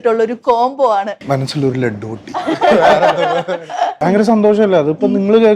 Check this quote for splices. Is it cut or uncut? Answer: cut